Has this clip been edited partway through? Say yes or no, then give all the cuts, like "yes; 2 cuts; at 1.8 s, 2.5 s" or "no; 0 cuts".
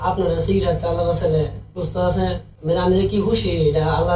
yes; 2 cuts; at 1.6 s, 2.5 s